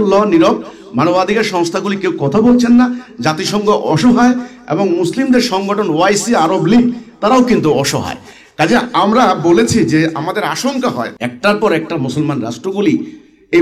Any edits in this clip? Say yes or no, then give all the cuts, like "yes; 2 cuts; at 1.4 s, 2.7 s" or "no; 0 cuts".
yes; 1 cut; at 11.2 s